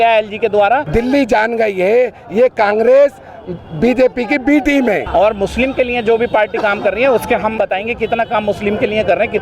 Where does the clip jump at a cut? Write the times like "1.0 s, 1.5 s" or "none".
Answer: 0.9 s, 5.0 s, 7.6 s